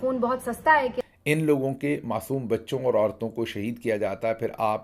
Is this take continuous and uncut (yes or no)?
no